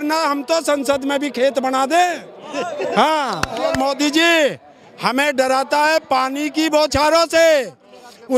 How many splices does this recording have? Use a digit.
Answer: 1